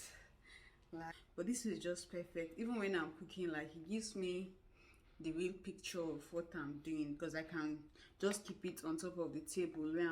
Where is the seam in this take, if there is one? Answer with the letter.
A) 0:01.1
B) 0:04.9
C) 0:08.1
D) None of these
A